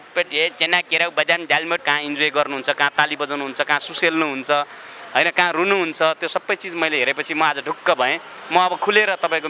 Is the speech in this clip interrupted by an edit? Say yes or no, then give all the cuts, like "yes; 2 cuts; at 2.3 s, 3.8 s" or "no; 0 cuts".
yes; 1 cut; at 1.8 s